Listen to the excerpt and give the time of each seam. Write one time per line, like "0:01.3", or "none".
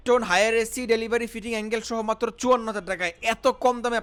none